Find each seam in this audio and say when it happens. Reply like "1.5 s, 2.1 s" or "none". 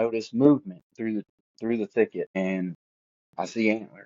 2.7 s